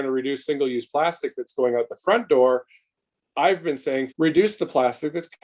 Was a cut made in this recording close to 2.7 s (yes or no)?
no